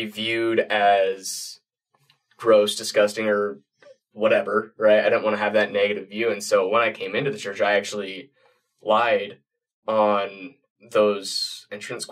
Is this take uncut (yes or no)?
yes